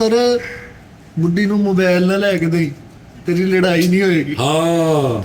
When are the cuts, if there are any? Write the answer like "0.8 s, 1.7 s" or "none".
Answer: none

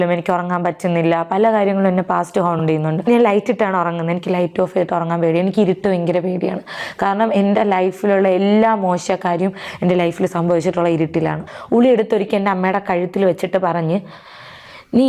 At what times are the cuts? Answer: 3.0 s, 11.5 s

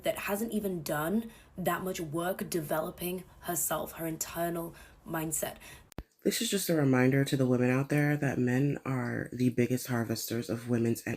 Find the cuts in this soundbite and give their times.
5.8 s

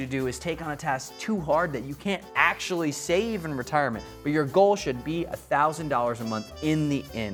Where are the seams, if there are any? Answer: none

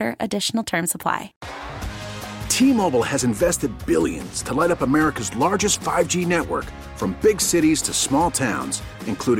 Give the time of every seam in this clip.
1.4 s

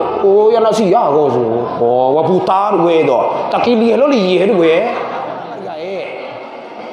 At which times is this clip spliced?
5.5 s

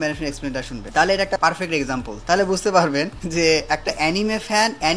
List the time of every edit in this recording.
none

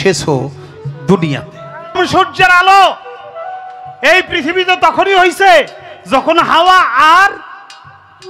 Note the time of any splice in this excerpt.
2.0 s

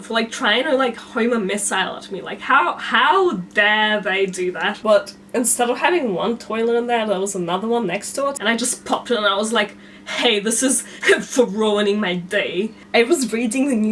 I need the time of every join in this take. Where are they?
4.7 s, 8.4 s, 12.8 s

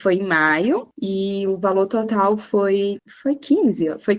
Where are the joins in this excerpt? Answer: none

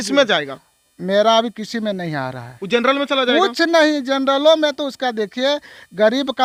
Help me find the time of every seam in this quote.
none

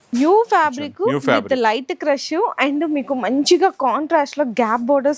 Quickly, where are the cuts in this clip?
none

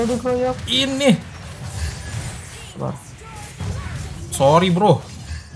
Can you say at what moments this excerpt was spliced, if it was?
none

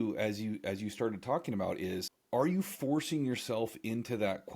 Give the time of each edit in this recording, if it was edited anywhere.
2.1 s

